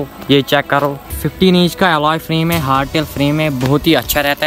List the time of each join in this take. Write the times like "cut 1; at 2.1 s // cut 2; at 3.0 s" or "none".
cut 1; at 1.2 s